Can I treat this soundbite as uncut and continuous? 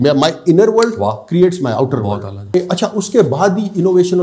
no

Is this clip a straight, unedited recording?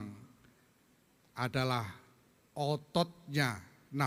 yes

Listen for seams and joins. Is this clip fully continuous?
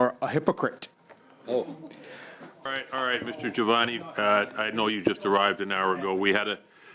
no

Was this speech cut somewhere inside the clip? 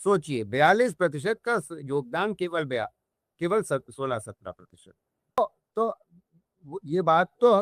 yes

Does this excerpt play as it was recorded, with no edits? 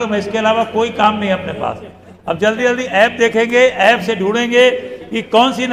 yes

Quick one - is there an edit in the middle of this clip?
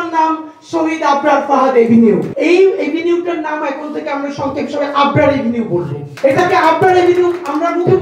yes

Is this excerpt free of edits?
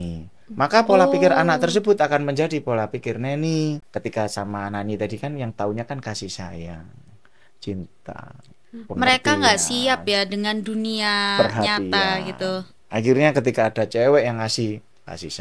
no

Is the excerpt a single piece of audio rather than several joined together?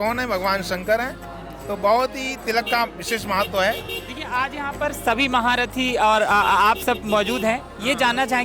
yes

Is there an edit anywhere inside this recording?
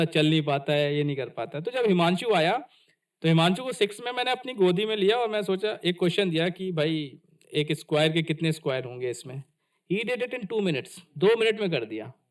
no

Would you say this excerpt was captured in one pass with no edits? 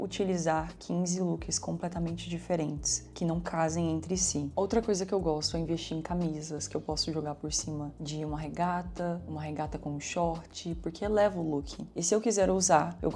no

